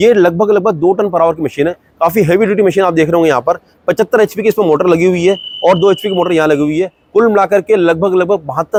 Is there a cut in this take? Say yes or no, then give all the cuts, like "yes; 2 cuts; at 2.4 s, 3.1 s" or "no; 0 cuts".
no; 0 cuts